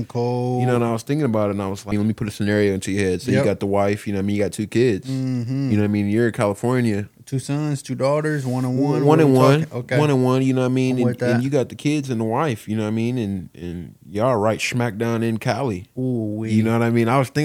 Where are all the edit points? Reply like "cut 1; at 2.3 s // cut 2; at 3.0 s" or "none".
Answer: cut 1; at 1.9 s

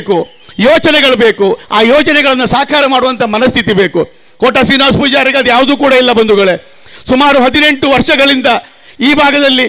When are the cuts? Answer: none

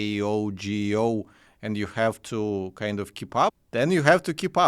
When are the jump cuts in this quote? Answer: cut 1; at 3.6 s

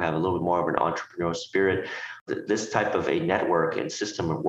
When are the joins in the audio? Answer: cut 1; at 2.2 s

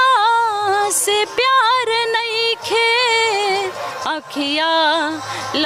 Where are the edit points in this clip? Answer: none

